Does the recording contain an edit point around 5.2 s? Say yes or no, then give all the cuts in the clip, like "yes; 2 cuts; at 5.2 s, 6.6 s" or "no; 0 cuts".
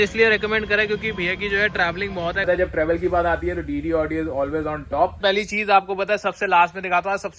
yes; 2 cuts; at 2.5 s, 5.2 s